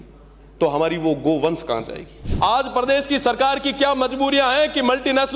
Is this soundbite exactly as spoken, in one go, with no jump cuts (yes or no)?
no